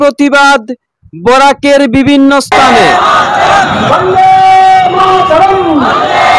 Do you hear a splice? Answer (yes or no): no